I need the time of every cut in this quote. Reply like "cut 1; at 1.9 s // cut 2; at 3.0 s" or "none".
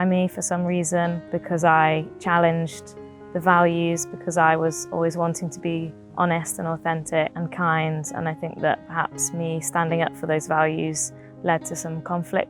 cut 1; at 1.2 s // cut 2; at 7.4 s